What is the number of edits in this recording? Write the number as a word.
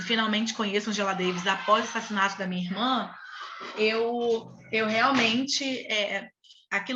zero